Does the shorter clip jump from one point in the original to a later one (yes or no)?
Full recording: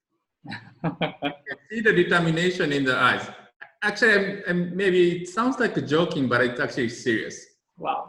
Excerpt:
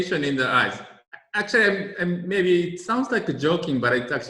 no